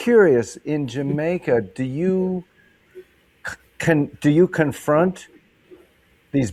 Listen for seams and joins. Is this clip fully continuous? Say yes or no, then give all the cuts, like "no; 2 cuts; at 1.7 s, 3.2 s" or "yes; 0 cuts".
yes; 0 cuts